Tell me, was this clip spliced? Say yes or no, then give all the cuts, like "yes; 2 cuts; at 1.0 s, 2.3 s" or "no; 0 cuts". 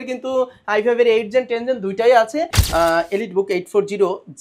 yes; 1 cut; at 2.6 s